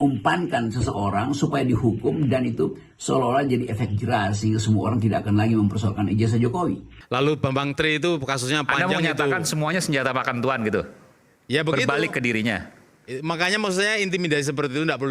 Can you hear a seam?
yes; 1 cut; at 6.9 s

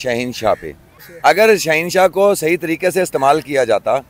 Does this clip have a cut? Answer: yes; 1 cut; at 1.1 s

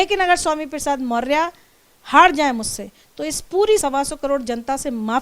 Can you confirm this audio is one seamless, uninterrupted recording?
no; 1 cut; at 3.8 s

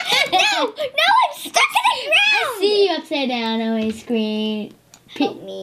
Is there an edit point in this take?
no; 0 cuts

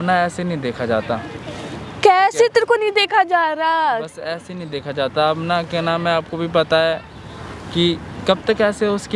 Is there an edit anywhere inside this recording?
no; 0 cuts

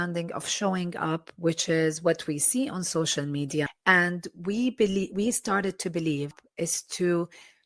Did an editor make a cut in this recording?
yes; 2 cuts; at 3.7 s, 6.4 s

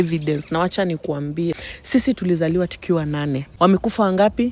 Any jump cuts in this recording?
yes; 2 cuts; at 1.7 s, 3.5 s

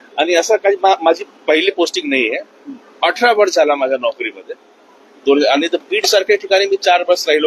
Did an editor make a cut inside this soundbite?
no; 0 cuts

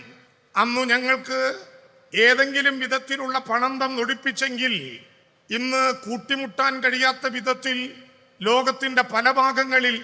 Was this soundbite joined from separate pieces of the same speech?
no; 0 cuts

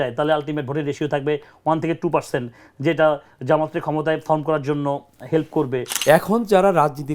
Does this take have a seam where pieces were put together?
yes; 1 cut; at 5.9 s

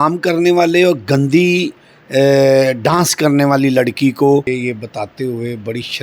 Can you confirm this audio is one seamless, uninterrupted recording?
no; 1 cut; at 4.5 s

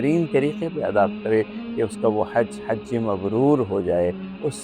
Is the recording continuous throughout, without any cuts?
yes; 0 cuts

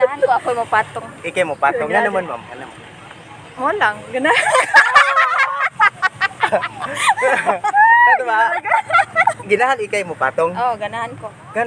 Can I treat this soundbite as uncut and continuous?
yes; 0 cuts

